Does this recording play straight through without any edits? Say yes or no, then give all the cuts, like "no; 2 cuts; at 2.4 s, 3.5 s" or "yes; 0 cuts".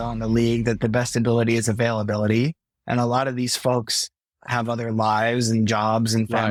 yes; 0 cuts